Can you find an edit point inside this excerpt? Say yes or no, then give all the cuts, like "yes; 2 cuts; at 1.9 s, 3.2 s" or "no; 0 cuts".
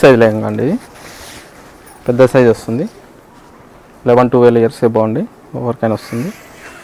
no; 0 cuts